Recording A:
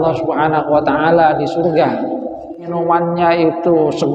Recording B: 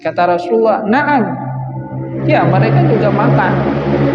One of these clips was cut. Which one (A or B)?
A